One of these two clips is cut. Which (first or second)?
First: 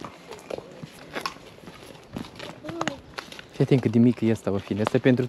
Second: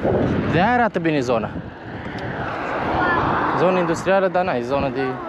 first